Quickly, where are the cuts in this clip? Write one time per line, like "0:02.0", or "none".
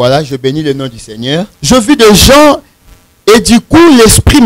0:01.5